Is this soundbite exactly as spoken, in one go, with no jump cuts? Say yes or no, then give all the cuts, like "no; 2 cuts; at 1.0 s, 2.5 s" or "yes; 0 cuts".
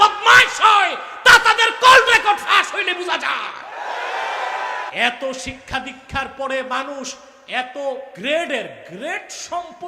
no; 2 cuts; at 4.9 s, 8.1 s